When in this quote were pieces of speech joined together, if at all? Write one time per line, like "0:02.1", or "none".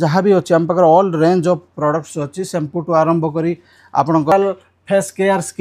0:04.3